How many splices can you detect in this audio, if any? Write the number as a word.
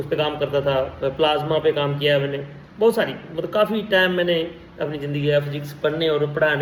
zero